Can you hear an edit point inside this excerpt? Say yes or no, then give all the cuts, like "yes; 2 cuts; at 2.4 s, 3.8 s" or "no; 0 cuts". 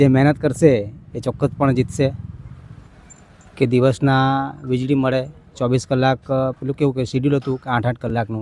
no; 0 cuts